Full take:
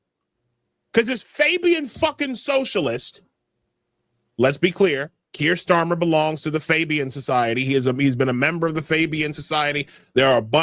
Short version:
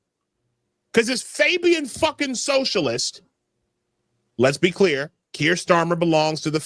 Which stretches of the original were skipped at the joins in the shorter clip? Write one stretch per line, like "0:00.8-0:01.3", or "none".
none